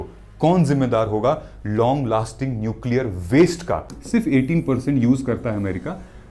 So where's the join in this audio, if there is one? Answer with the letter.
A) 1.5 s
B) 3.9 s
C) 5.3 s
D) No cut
B